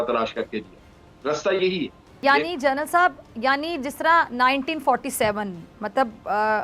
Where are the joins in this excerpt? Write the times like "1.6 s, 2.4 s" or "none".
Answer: 2.2 s